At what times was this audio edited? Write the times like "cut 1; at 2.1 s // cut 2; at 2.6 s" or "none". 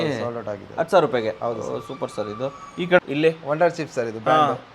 cut 1; at 3.0 s